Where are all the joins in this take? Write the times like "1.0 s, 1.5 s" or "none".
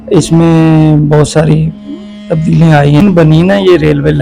3.2 s

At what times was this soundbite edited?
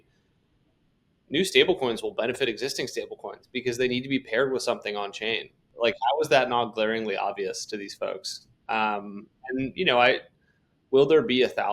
5.6 s

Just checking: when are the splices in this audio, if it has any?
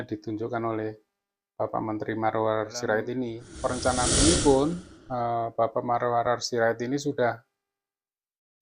3.4 s

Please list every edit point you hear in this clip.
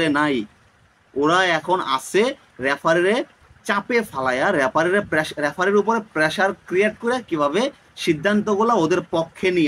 none

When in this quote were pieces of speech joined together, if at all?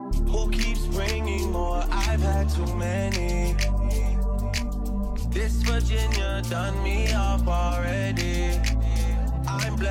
none

